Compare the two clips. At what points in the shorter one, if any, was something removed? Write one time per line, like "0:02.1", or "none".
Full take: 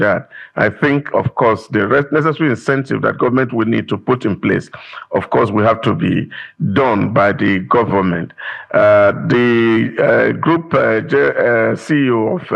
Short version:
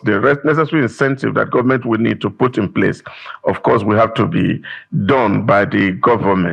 none